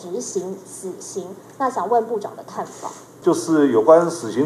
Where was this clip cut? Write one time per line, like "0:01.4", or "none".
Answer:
0:03.1